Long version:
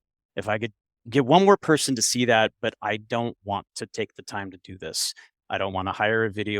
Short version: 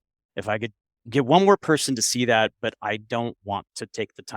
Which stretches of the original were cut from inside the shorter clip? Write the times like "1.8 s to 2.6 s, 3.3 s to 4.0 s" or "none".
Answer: none